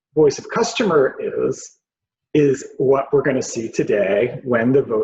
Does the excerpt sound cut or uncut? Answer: uncut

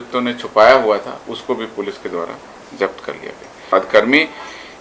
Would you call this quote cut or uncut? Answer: cut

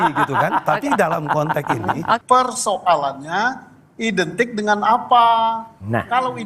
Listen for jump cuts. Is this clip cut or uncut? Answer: cut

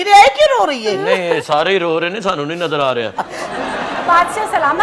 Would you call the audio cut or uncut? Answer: cut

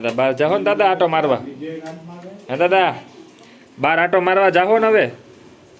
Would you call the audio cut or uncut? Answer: uncut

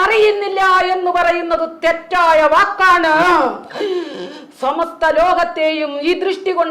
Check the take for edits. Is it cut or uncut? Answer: uncut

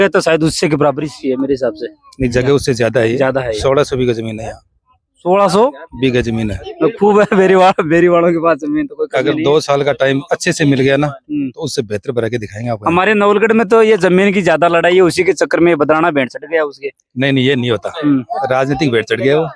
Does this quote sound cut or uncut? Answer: uncut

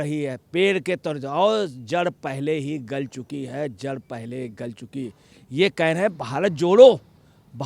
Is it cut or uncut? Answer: cut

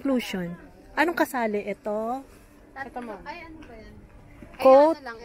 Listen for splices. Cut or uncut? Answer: uncut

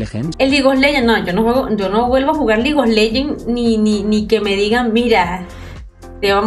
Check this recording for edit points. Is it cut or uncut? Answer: uncut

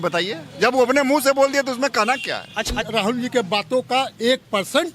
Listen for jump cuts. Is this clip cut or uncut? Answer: cut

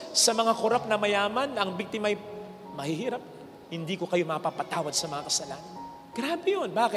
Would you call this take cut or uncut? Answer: uncut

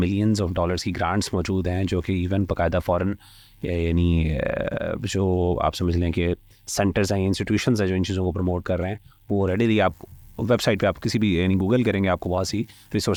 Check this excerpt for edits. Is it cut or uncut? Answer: uncut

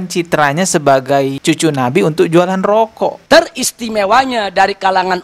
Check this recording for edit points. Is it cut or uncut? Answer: cut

